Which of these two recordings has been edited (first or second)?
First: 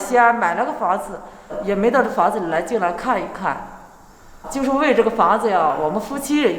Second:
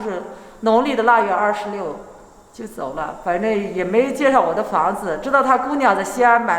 first